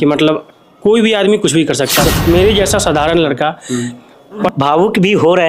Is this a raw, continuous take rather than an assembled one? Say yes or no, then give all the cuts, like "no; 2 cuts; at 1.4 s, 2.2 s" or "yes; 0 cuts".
no; 2 cuts; at 2.0 s, 4.5 s